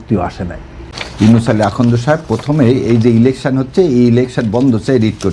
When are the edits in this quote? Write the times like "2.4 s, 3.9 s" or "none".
1.0 s